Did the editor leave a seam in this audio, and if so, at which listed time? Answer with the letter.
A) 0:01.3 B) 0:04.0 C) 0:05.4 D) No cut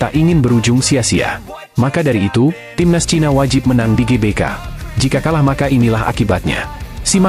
D